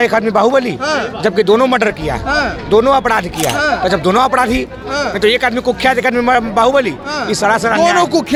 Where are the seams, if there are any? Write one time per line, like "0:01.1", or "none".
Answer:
none